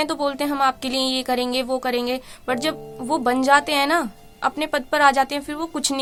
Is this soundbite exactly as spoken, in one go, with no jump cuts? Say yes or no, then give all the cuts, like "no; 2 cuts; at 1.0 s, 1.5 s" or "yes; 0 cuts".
yes; 0 cuts